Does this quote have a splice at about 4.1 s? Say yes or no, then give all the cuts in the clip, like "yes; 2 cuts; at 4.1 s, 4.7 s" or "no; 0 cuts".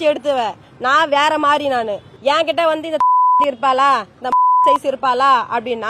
no; 1 cut; at 2.0 s